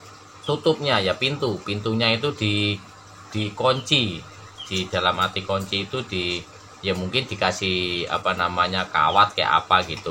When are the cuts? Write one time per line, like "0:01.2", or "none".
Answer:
none